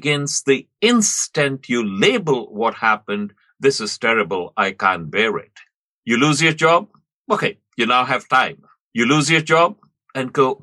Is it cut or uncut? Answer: uncut